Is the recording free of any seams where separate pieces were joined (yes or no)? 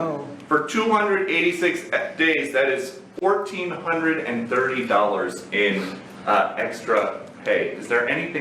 yes